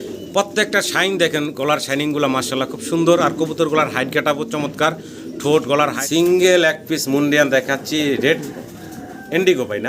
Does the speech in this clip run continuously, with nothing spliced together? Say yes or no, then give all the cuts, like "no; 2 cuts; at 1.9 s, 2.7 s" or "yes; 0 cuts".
no; 1 cut; at 6.0 s